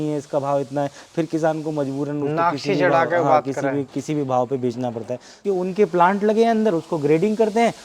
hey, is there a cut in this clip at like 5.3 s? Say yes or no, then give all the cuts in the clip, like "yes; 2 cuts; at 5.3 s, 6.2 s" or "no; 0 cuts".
yes; 1 cut; at 5.3 s